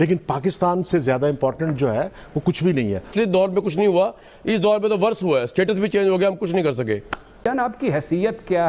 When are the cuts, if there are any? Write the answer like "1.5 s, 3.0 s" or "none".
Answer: 3.1 s, 7.4 s